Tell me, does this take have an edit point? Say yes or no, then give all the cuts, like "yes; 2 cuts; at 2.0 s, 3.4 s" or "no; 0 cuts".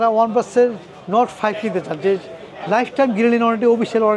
no; 0 cuts